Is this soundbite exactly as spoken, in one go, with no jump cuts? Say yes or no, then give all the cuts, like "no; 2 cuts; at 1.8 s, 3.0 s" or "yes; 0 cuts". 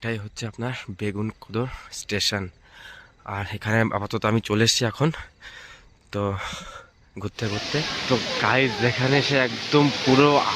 no; 1 cut; at 7.9 s